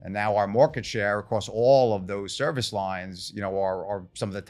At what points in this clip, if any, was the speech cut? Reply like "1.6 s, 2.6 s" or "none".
none